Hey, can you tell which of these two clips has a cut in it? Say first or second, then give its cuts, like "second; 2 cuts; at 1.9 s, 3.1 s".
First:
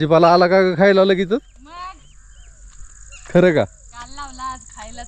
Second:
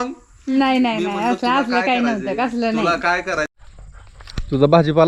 second; 1 cut; at 3.5 s